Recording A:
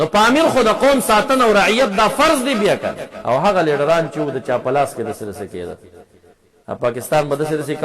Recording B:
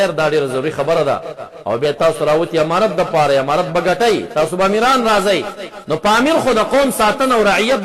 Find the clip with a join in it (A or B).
A